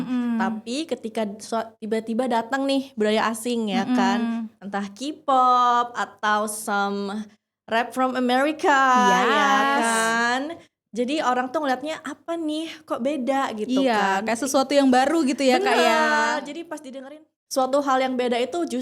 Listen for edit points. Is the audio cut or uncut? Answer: cut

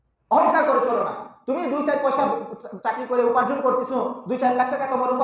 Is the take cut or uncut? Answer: uncut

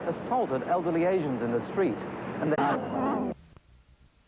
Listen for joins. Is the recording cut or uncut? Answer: uncut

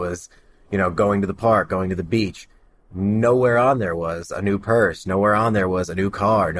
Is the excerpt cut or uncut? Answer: uncut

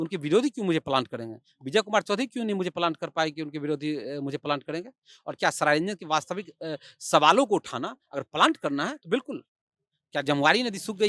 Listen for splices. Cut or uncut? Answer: uncut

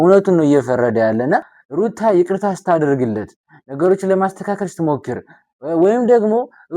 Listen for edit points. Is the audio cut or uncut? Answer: cut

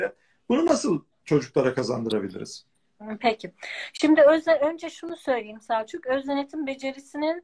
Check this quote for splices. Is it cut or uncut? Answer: uncut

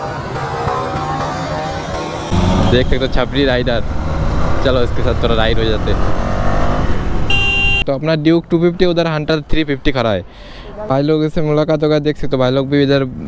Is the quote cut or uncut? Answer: cut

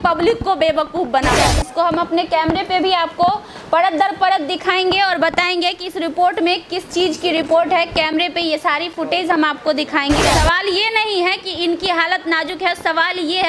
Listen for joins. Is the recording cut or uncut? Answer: cut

